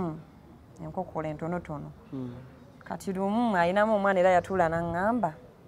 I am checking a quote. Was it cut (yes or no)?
no